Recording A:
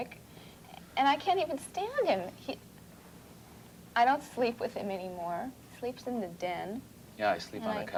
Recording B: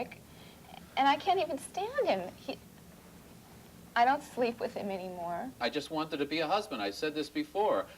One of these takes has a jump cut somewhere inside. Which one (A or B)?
B